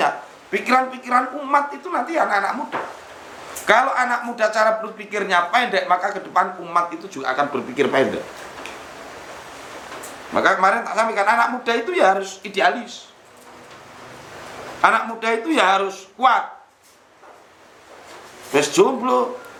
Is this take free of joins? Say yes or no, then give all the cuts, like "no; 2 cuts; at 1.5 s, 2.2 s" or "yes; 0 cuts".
yes; 0 cuts